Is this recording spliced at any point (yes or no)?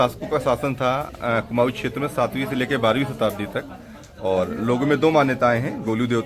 no